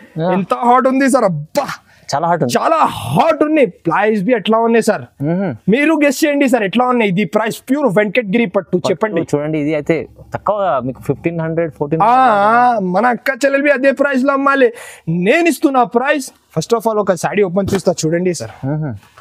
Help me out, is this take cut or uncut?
uncut